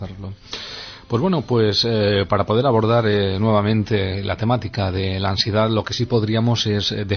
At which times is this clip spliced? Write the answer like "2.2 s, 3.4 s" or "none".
1.2 s

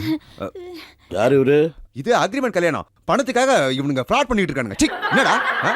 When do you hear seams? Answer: 1.9 s

